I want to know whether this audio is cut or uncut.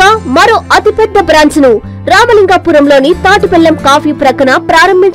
uncut